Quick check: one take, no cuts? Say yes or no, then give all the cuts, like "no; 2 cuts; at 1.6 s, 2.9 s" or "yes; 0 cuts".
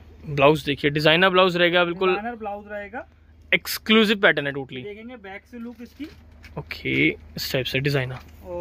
yes; 0 cuts